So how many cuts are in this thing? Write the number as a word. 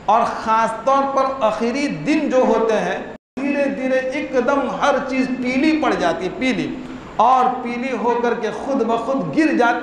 one